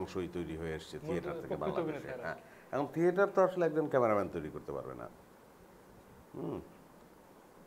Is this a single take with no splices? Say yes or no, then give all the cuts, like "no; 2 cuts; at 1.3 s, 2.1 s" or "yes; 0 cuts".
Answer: yes; 0 cuts